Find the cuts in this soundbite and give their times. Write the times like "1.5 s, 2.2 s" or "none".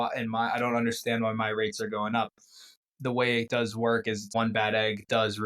2.7 s, 4.3 s